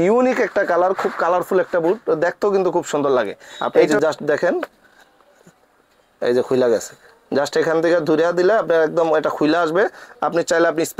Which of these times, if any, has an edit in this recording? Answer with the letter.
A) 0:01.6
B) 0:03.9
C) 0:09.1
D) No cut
B